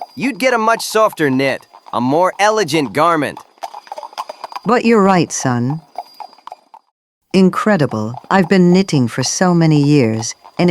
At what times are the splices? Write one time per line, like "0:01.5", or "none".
none

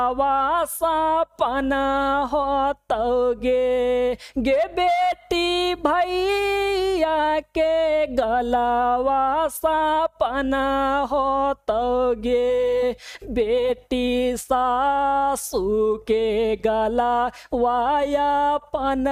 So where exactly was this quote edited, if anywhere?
none

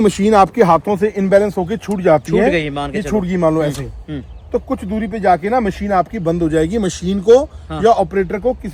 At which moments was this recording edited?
none

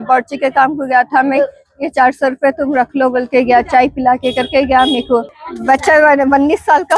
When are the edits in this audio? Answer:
0:05.4

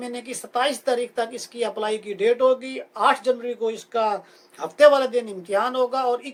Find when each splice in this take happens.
none

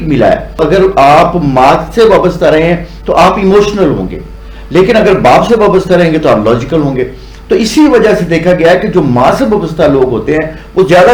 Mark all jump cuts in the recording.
none

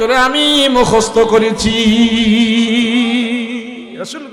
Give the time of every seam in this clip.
none

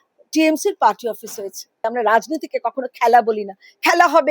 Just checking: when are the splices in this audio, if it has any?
0:01.8

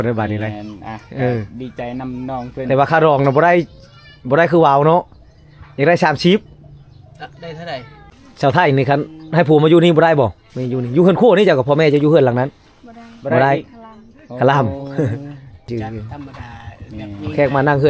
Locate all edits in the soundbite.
0:08.1
0:15.6

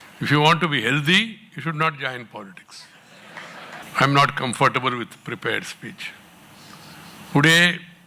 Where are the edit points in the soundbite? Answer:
0:03.8

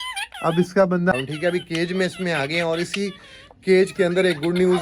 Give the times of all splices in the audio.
0:01.1

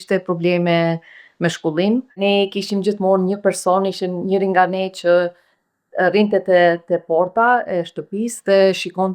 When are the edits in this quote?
0:02.2

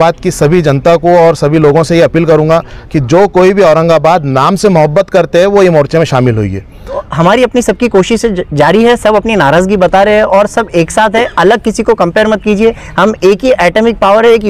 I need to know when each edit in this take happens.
0:07.1

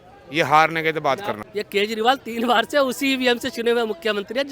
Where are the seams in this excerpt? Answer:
0:01.4

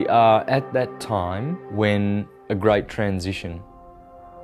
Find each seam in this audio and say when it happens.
0:01.6

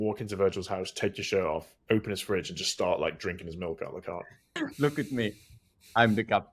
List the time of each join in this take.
0:04.5

